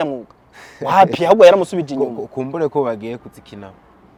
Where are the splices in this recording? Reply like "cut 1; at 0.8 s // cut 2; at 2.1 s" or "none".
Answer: none